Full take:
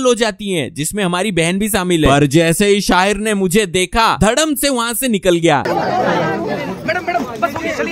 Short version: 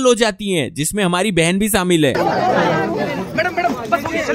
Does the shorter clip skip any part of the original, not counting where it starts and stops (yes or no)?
yes